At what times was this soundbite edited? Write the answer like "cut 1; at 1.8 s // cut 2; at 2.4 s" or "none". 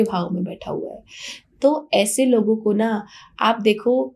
none

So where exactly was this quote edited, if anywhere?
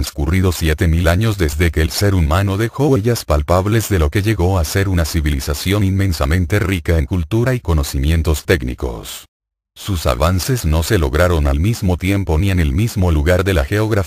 cut 1; at 6.7 s

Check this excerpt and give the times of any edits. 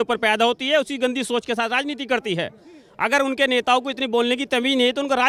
none

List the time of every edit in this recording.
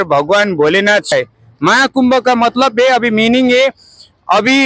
cut 1; at 1.1 s

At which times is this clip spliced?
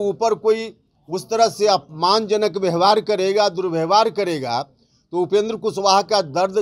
none

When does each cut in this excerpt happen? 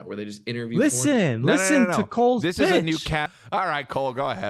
cut 1; at 3.2 s

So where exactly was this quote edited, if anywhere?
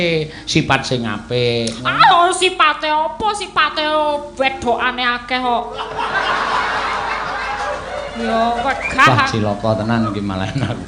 none

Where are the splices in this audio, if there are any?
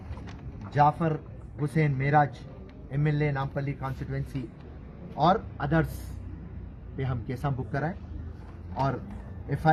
none

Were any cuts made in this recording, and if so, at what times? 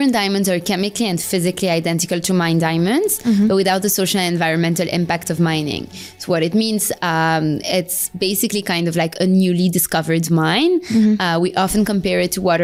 none

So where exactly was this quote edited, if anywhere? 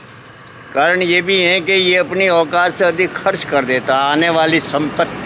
none

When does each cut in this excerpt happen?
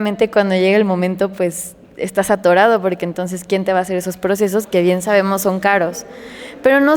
none

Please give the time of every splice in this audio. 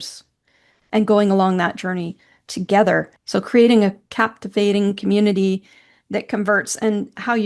cut 1; at 3.2 s

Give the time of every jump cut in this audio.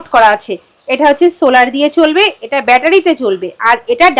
none

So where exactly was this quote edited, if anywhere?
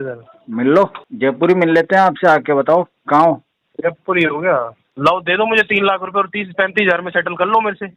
cut 1; at 1.0 s // cut 2; at 4.9 s

